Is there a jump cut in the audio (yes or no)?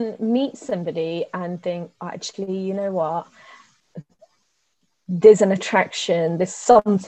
no